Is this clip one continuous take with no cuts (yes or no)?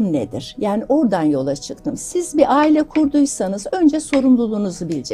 yes